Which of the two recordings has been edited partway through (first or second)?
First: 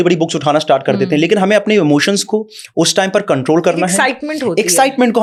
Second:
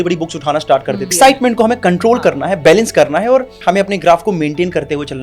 second